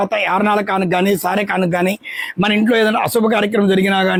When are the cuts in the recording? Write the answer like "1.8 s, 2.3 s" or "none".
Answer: none